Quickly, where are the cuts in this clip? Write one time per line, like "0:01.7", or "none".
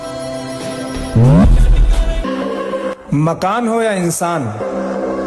0:02.3